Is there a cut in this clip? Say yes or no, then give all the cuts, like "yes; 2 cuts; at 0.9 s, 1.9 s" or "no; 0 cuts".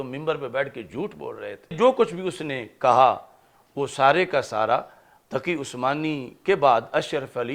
yes; 1 cut; at 1.7 s